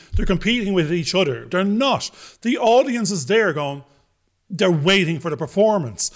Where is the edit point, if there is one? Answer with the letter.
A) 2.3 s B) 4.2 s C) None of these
C